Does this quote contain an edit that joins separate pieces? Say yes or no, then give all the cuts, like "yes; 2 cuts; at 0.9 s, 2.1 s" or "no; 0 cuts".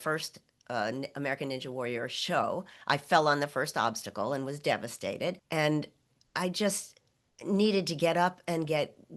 yes; 1 cut; at 5.4 s